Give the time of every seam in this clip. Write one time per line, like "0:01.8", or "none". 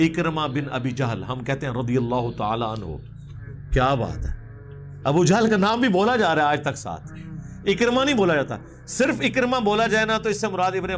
none